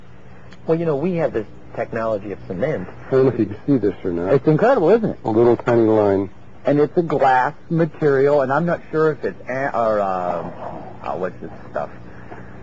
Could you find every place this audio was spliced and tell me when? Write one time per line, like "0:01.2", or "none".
0:09.7